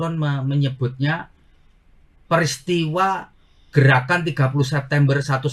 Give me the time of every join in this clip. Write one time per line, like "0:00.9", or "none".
none